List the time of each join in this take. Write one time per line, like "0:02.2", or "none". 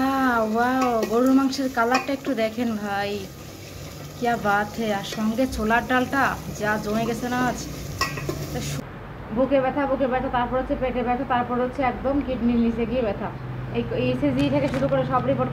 0:08.7